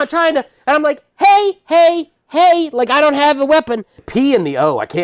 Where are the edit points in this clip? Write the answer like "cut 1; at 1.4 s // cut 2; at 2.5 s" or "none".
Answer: cut 1; at 4.0 s